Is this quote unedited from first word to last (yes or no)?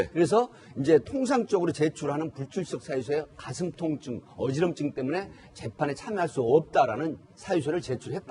no